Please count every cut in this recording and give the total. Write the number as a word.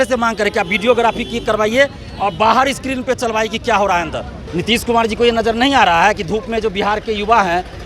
one